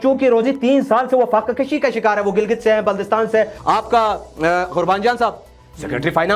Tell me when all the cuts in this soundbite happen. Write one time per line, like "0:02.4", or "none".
0:03.6